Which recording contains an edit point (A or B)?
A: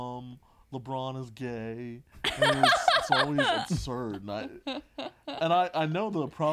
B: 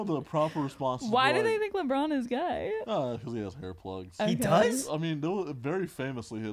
B